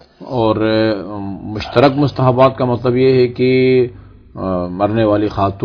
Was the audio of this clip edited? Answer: no; 0 cuts

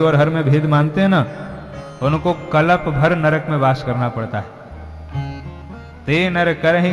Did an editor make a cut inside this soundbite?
no; 0 cuts

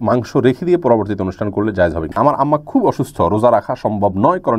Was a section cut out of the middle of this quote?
yes; 1 cut; at 2.0 s

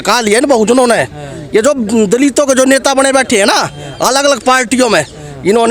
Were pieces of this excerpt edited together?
no; 0 cuts

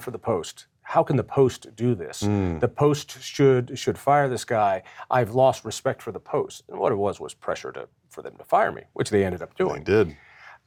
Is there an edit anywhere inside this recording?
no; 0 cuts

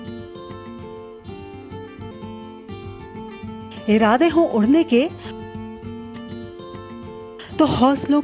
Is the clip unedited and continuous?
no; 1 cut; at 1.1 s

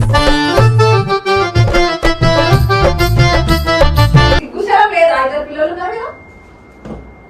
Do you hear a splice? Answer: yes; 1 cut; at 4.5 s

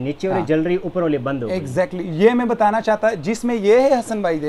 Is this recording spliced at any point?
no; 0 cuts

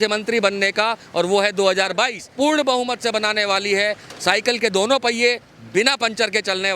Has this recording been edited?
yes; 1 cut; at 2.2 s

